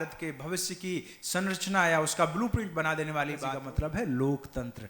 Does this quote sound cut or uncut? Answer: cut